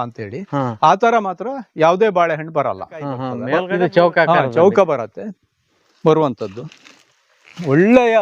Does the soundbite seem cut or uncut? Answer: cut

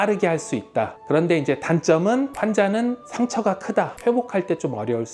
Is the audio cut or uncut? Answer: cut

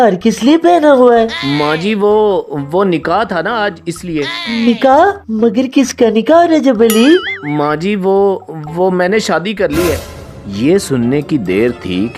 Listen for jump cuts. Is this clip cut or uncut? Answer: uncut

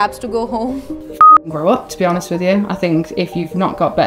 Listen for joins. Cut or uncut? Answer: cut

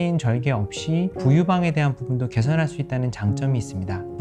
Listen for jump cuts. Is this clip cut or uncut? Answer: uncut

